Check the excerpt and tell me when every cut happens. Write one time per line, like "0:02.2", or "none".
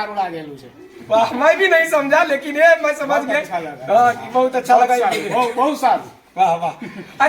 none